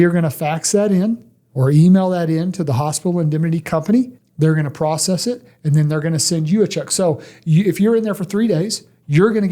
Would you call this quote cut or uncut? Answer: cut